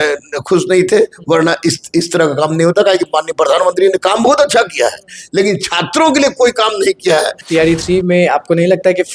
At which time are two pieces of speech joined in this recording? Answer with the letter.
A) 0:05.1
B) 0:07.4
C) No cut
B